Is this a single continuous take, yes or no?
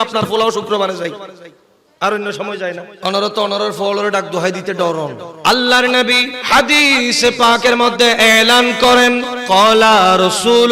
no